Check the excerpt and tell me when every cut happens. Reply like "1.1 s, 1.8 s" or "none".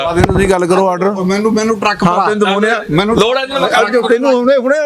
none

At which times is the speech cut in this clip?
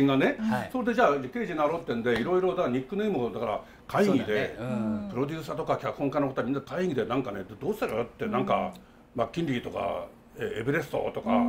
none

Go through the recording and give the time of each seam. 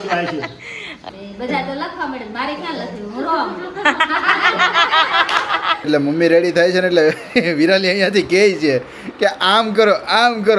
1.0 s, 5.9 s

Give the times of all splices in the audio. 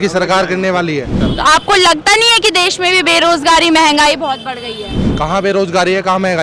1.2 s

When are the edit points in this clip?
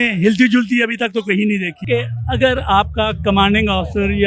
1.8 s

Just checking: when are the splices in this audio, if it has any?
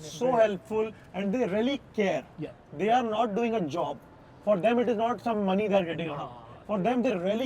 none

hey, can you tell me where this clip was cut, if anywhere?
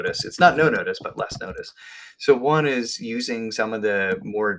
none

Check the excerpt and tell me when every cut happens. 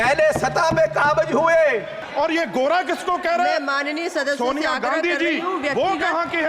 2.0 s

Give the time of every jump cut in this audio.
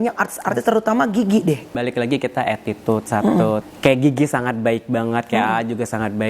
1.7 s, 3.7 s

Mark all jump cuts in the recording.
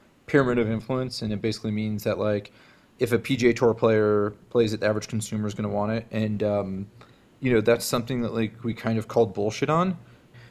none

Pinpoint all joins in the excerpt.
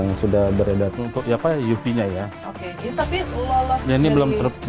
0.9 s

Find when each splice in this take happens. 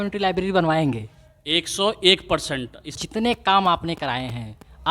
2.9 s

